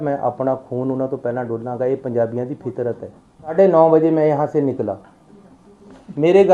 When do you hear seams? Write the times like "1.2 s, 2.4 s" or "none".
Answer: 3.5 s